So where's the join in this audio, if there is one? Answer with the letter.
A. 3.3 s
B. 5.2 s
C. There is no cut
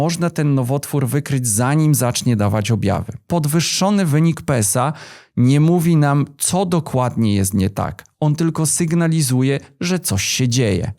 A